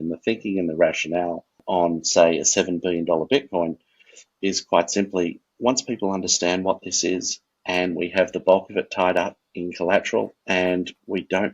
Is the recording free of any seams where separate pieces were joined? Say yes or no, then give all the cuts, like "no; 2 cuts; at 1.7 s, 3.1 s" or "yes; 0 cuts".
no; 3 cuts; at 1.6 s, 5.4 s, 10.4 s